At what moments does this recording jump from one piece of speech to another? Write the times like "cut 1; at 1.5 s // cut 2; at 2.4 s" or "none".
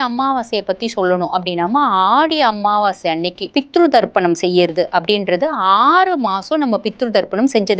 cut 1; at 3.4 s

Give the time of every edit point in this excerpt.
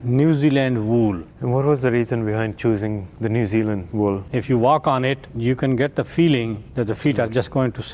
cut 1; at 1.3 s // cut 2; at 3.1 s // cut 3; at 4.2 s // cut 4; at 5.3 s // cut 5; at 6.7 s

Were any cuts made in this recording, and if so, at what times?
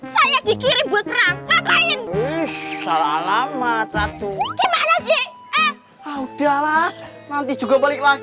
cut 1; at 4.4 s

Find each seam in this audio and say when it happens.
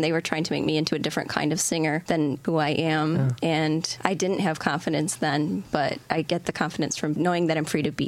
cut 1; at 2.3 s // cut 2; at 3.4 s // cut 3; at 6.0 s // cut 4; at 7.2 s

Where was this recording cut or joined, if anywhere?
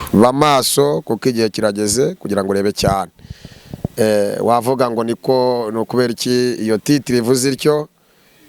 none

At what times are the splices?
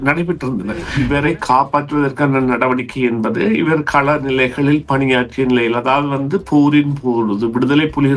cut 1; at 1.0 s

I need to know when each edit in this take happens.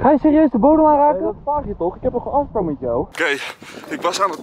cut 1; at 3.1 s

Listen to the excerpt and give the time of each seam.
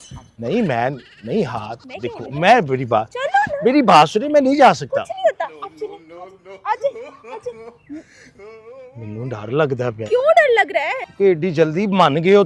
cut 1; at 11.0 s

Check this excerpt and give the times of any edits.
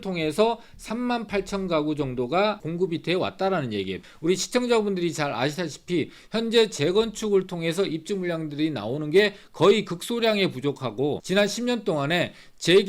cut 1; at 2.6 s // cut 2; at 4.0 s // cut 3; at 11.2 s

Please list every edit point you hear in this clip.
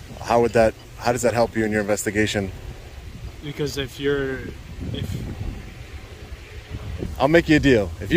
cut 1; at 7.0 s

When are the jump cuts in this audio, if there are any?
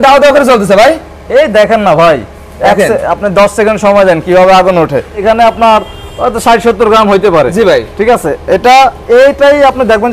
cut 1; at 5.2 s

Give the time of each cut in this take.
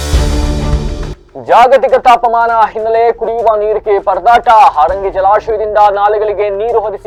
none

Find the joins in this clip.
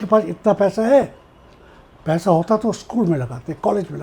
none

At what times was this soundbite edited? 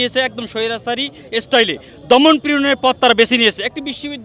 none

